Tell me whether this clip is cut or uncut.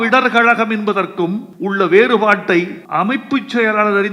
cut